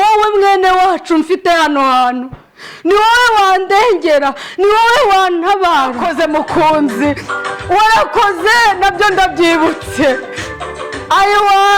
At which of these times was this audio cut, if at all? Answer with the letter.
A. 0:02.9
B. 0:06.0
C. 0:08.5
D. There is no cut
B